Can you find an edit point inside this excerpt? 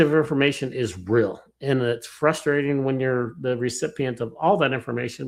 no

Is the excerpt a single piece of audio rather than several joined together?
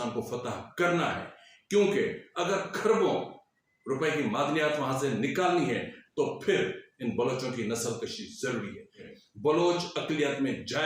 no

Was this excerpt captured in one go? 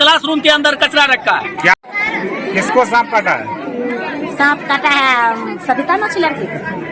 no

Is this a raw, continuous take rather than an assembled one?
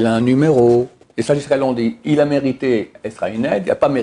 no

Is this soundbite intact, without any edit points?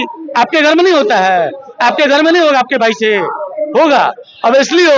yes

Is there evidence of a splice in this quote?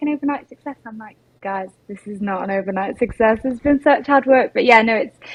no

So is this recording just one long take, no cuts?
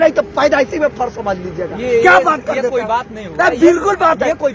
yes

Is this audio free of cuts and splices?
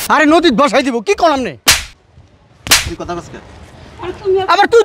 yes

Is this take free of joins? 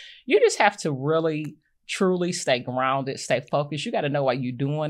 yes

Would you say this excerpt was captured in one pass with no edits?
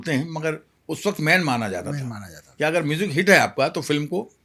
yes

